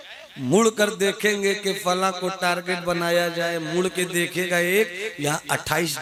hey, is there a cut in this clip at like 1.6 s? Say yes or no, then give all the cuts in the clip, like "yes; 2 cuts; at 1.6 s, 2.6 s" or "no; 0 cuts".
no; 0 cuts